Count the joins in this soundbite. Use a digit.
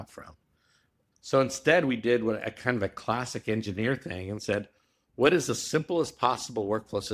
0